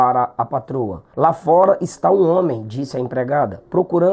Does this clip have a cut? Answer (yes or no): yes